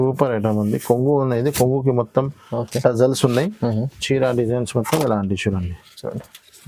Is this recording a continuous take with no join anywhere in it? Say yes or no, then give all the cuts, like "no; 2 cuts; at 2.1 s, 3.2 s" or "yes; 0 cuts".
yes; 0 cuts